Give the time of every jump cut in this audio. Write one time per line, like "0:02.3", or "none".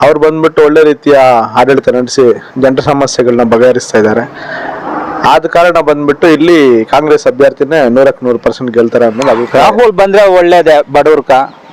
0:09.4